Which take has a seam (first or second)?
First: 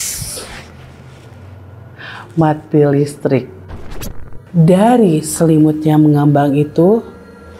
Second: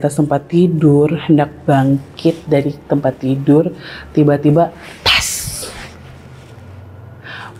first